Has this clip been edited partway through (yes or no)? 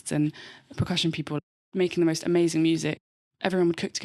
yes